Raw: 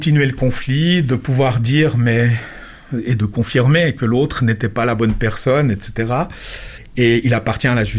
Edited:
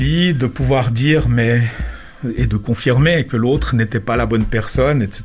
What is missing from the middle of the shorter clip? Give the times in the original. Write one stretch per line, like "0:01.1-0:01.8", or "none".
none

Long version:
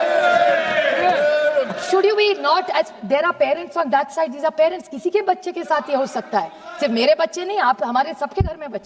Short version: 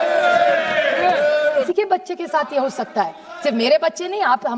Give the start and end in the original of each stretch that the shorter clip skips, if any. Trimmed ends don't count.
0:01.7-0:05.1

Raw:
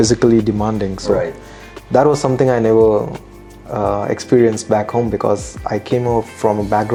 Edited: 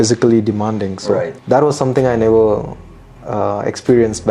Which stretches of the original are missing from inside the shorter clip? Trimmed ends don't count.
0:01.3-0:01.8

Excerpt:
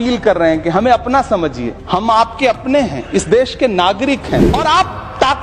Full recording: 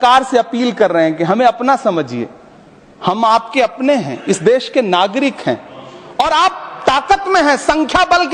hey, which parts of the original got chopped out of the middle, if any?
0:02.3-0:02.9
0:05.6-0:06.1

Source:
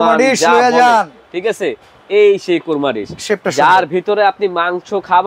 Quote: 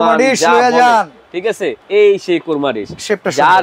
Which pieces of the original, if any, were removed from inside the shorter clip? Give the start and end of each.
0:01.8-0:02.0

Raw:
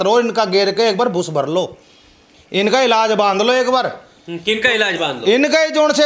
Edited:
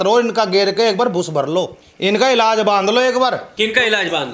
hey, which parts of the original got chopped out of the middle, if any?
0:01.8-0:02.3
0:04.0-0:04.3

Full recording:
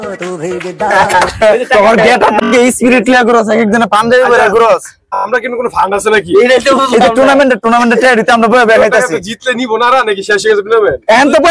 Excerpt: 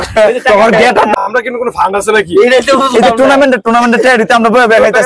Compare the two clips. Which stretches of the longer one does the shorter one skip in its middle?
0:02.4-0:05.1

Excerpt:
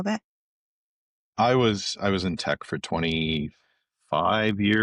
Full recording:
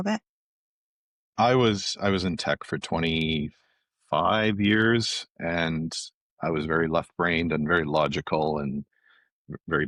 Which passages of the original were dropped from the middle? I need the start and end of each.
none

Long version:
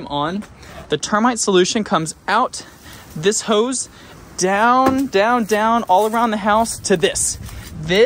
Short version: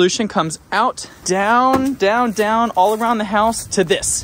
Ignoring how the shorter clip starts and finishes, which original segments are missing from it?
0:02.6-0:04.2

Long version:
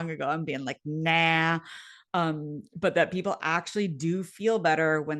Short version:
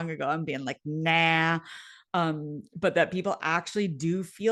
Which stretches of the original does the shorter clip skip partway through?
none

